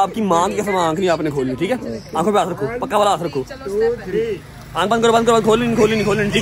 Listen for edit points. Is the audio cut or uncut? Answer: uncut